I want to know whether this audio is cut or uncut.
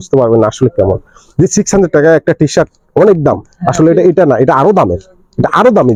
uncut